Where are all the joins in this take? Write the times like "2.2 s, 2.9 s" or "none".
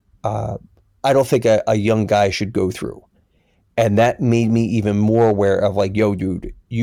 none